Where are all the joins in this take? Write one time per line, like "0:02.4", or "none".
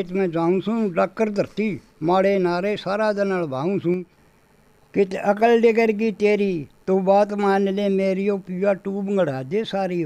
0:04.2